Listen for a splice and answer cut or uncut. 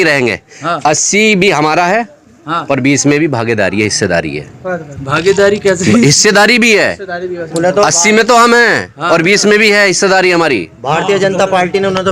uncut